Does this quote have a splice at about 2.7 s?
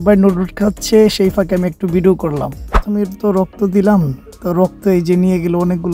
yes; 1 cut; at 2.7 s

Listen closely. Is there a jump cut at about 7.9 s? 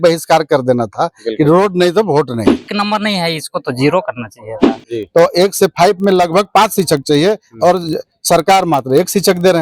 no; 2 cuts; at 2.7 s, 4.7 s

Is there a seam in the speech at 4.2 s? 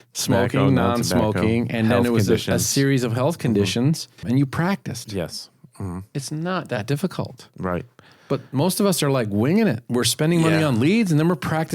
yes; 1 cut; at 4.2 s

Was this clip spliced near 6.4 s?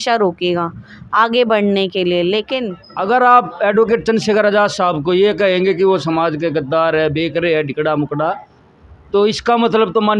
no; 1 cut; at 2.8 s

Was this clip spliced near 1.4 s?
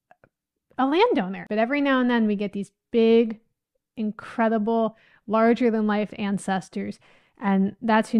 yes; 1 cut; at 1.4 s

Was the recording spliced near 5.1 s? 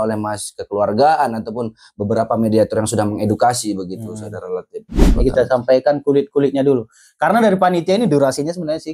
yes; 1 cut; at 5.1 s

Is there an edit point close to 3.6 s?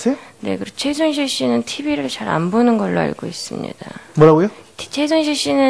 no; 1 cut; at 1.2 s

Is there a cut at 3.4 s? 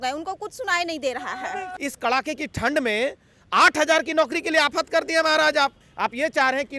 no; 2 cuts; at 1.7 s, 5.8 s

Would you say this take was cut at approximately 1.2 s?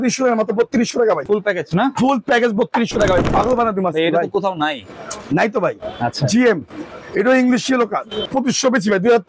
yes; 3 cuts; at 1.2 s, 3.2 s, 8.2 s

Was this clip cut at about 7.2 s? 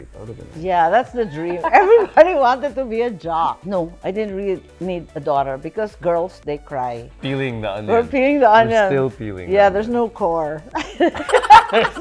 yes; 2 cuts; at 3.6 s, 7.2 s

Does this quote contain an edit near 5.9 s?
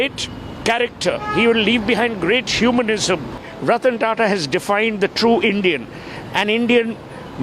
no; 1 cut; at 3.5 s

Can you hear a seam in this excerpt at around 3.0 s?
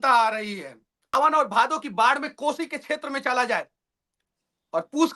no; 1 cut; at 1.1 s

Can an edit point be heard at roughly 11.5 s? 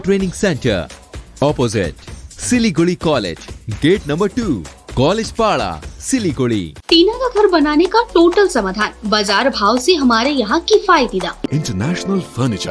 yes; 2 cuts; at 6.8 s, 11.5 s

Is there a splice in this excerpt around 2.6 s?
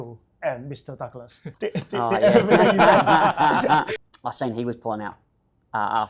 no; 1 cut; at 3.9 s

